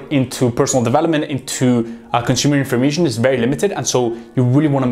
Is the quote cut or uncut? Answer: uncut